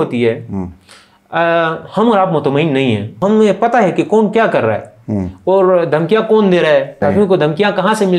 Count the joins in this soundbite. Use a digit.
2